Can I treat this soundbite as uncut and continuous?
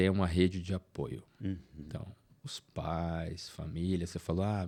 yes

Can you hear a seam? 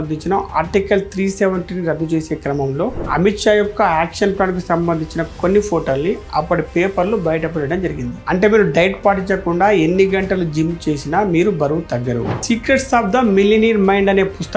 yes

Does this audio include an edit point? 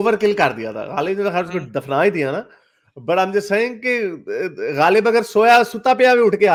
no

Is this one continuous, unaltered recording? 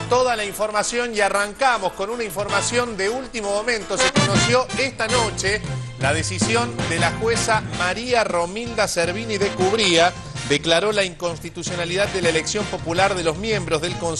yes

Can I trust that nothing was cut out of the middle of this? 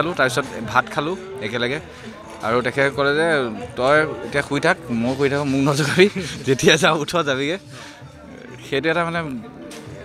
yes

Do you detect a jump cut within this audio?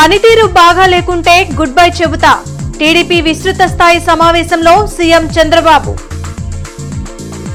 no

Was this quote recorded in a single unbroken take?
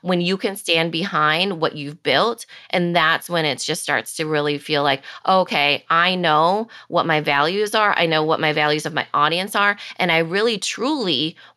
yes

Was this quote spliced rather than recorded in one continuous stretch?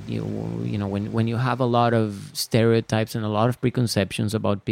no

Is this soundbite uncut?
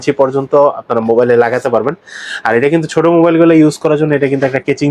yes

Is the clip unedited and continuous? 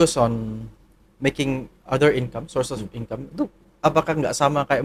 yes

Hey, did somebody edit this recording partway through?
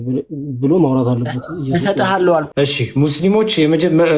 yes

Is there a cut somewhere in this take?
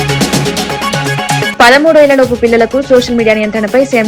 yes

